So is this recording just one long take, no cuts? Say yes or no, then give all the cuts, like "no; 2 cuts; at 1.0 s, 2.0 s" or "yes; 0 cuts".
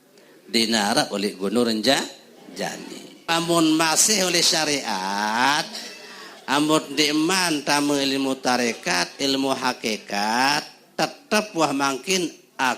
no; 1 cut; at 3.3 s